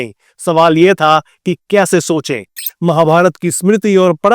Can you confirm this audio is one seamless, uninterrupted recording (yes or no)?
no